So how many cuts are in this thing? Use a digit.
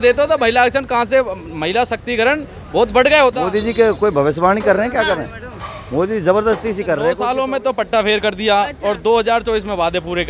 2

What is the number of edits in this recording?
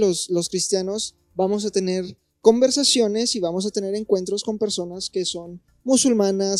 0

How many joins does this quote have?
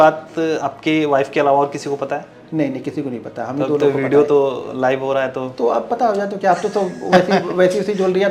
0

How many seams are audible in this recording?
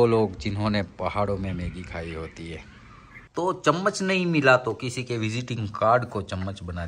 1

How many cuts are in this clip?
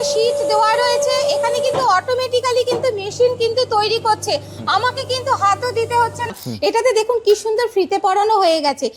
1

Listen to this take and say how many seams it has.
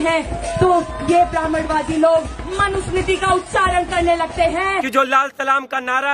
1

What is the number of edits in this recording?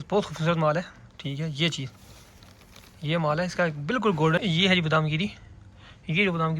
1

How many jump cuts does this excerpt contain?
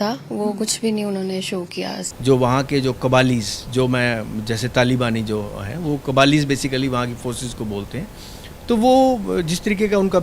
1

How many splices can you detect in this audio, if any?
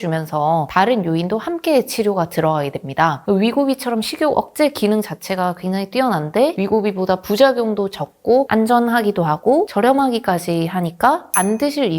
1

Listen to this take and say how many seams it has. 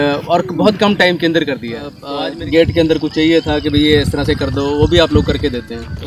1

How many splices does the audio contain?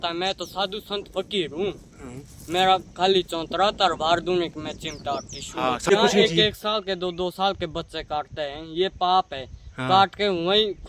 1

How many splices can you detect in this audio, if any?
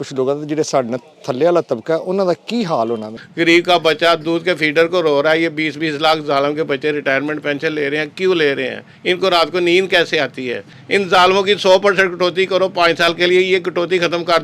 2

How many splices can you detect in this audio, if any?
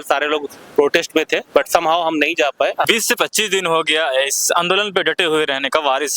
1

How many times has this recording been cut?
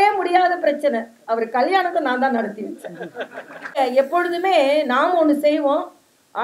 1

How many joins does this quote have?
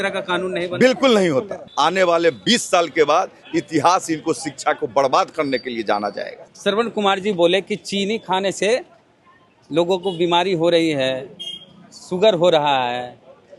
2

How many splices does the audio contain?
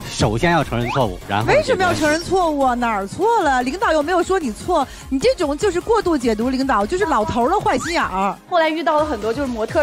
1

